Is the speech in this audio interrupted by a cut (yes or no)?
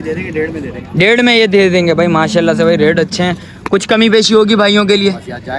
no